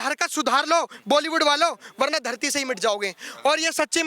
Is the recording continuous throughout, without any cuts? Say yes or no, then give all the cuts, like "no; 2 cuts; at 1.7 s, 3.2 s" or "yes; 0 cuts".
yes; 0 cuts